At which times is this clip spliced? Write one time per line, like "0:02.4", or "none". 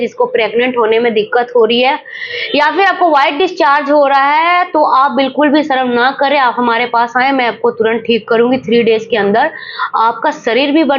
none